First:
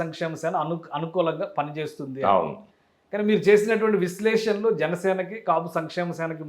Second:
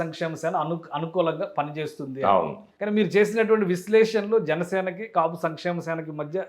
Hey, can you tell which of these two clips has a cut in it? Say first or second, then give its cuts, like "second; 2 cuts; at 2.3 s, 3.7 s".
second; 1 cut; at 2.7 s